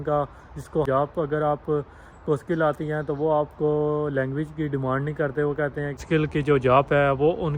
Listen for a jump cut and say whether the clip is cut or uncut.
cut